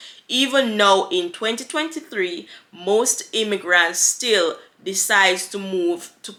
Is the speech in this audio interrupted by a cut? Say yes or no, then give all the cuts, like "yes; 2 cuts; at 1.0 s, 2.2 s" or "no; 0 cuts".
no; 0 cuts